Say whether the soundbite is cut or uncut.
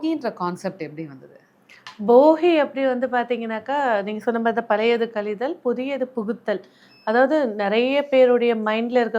uncut